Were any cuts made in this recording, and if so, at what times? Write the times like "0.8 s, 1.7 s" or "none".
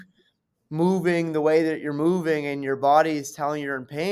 none